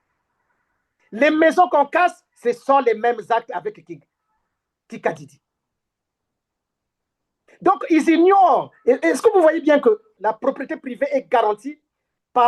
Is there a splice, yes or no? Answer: yes